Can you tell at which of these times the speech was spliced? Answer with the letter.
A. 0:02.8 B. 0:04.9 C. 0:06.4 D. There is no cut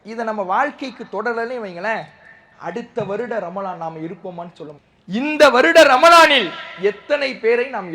B